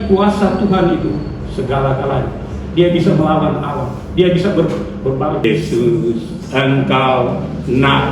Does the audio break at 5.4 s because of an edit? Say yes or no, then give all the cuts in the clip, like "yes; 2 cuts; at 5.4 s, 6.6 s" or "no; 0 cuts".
yes; 1 cut; at 5.4 s